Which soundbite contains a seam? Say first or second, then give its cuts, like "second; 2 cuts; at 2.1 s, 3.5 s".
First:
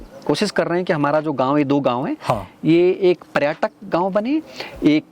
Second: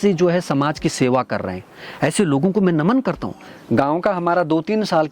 second; 1 cut; at 3.4 s